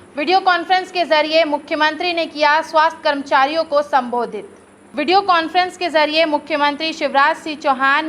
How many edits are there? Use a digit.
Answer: 0